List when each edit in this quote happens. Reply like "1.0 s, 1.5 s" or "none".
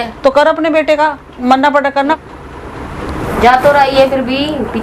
2.2 s